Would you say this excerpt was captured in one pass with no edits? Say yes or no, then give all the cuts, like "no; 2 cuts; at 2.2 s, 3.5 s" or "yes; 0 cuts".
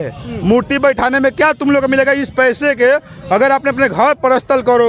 yes; 0 cuts